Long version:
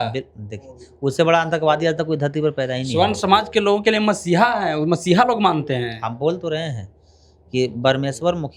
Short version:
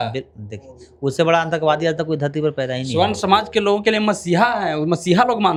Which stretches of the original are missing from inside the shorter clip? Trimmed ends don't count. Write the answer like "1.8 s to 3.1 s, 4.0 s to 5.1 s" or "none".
none